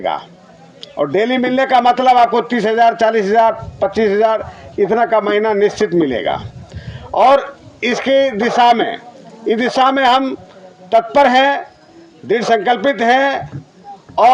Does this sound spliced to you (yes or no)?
no